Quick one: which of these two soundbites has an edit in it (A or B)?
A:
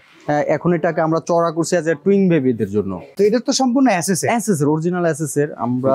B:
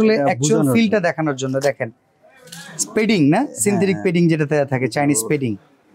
A